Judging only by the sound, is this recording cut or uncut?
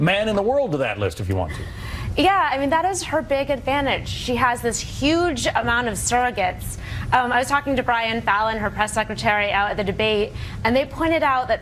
uncut